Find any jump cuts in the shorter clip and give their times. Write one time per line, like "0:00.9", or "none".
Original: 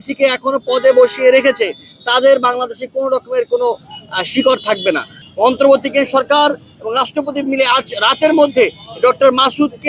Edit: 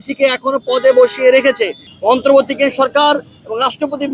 0:01.9